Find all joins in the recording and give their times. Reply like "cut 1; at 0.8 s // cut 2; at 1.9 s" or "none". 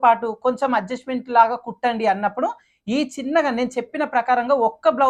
none